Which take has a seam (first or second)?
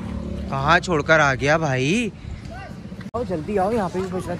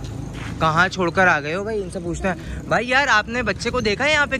first